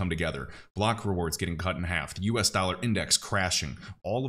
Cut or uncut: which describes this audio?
uncut